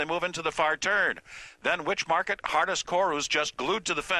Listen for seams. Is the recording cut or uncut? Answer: cut